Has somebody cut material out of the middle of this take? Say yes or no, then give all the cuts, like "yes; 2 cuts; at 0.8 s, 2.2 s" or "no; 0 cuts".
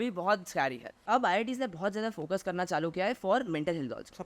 yes; 1 cut; at 1.0 s